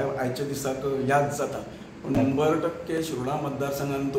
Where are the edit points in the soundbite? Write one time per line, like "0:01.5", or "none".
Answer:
0:02.2